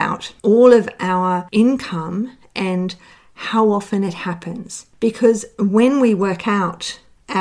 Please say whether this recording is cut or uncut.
uncut